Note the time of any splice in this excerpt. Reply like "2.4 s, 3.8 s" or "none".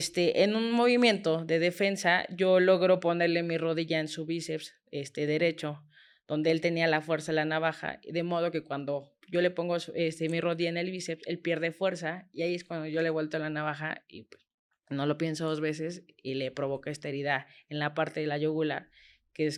none